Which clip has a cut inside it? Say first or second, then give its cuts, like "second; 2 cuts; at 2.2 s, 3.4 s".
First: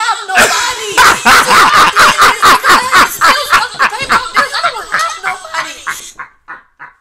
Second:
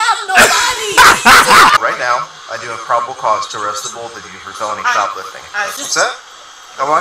second; 2 cuts; at 1.7 s, 5.8 s